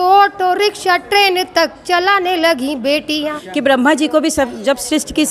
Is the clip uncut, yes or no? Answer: no